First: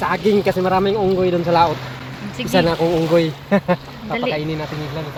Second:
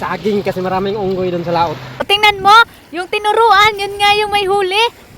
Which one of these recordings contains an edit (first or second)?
second